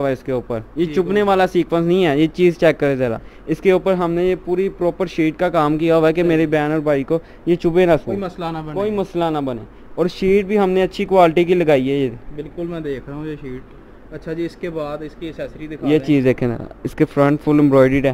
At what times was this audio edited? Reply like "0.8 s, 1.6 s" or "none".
none